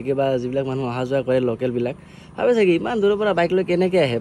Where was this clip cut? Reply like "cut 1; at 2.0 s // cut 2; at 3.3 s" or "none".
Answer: none